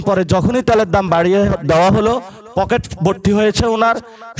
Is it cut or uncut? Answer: uncut